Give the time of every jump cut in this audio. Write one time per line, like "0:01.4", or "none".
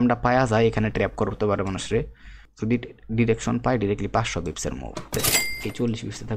0:02.4
0:05.1